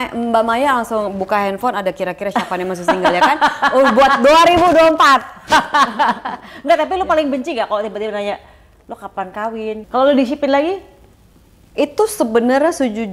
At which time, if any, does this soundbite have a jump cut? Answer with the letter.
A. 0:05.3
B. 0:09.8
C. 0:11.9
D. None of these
B